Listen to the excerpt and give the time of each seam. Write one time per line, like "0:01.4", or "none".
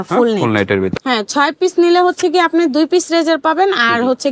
0:01.0